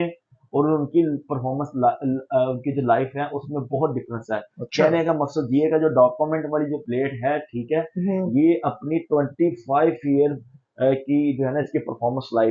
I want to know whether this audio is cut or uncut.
uncut